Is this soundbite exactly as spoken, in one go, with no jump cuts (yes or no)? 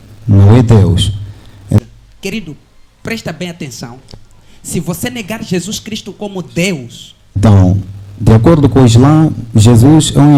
yes